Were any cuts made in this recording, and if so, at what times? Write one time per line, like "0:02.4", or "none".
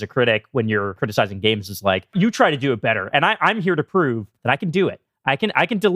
0:01.0
0:02.1
0:04.3